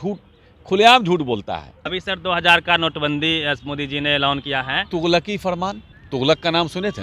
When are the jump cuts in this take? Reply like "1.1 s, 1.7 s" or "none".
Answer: 1.9 s, 4.4 s, 5.9 s